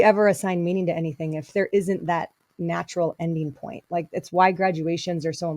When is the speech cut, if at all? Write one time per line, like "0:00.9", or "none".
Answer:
0:01.5